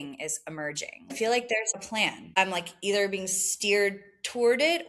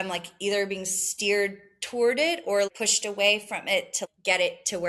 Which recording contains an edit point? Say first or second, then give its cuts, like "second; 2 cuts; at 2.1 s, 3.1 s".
first; 1 cut; at 1.1 s